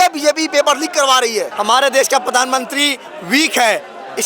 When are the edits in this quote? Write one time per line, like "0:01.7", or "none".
0:01.5